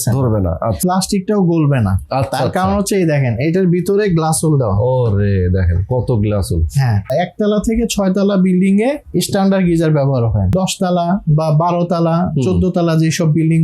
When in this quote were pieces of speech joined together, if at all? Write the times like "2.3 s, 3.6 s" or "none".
0.8 s, 7.1 s, 10.5 s